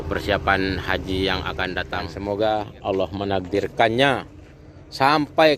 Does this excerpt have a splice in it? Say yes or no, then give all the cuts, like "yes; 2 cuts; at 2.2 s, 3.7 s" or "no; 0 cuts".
yes; 1 cut; at 2.1 s